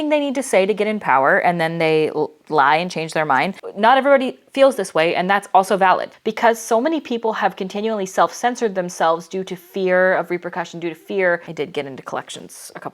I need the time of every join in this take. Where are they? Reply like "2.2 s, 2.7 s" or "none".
3.6 s, 6.1 s, 11.5 s